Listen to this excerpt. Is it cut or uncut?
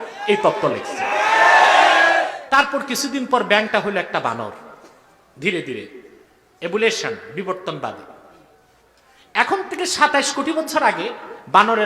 cut